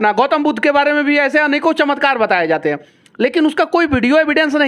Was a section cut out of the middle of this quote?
no; 0 cuts

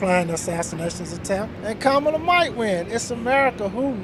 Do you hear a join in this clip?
no; 0 cuts

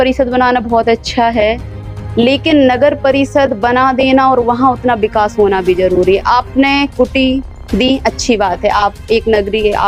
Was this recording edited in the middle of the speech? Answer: no; 0 cuts

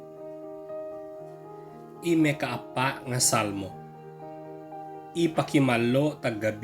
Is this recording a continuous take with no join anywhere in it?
no; 3 cuts; at 2.0 s, 3.7 s, 5.1 s

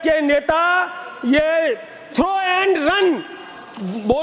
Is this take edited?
no; 0 cuts

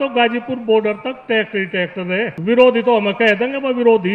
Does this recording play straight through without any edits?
no; 1 cut; at 2.4 s

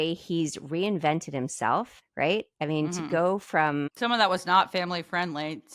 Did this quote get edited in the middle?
yes; 2 cuts; at 2.0 s, 3.9 s

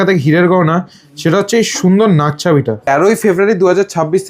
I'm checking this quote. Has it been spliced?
yes; 1 cut; at 2.8 s

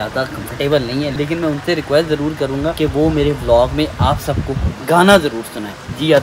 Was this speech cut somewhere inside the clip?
no; 0 cuts

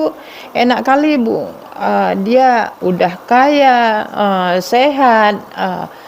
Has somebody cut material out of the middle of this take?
yes; 1 cut; at 2.7 s

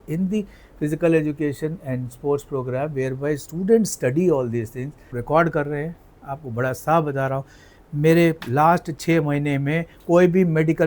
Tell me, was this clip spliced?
yes; 1 cut; at 5.2 s

